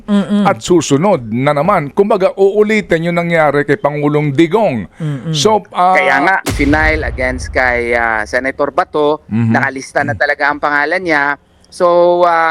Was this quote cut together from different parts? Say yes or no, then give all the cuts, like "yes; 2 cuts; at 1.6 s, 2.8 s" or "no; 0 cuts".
yes; 1 cut; at 6.4 s